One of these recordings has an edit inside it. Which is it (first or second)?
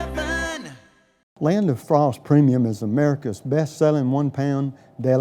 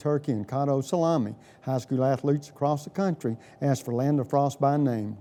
first